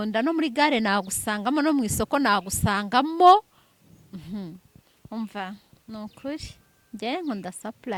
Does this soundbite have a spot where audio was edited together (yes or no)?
no